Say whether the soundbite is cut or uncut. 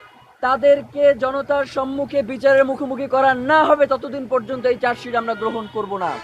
uncut